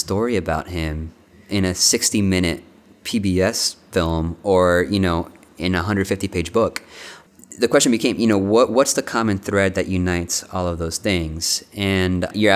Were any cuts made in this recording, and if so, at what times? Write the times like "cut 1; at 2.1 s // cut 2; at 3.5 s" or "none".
none